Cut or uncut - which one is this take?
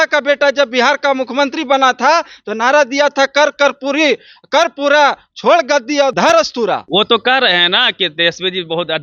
cut